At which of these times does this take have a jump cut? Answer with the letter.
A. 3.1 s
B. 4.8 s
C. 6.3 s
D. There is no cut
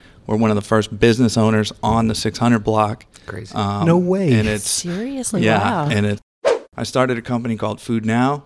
C